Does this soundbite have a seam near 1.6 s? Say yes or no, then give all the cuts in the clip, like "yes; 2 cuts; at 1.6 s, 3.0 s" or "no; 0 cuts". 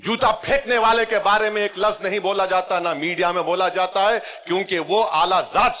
no; 0 cuts